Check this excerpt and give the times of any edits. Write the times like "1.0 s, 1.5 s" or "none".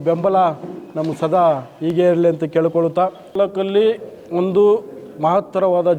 3.3 s